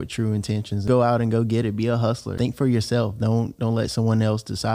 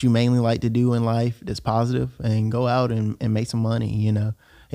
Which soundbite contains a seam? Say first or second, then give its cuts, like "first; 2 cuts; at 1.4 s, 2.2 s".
first; 2 cuts; at 0.8 s, 2.3 s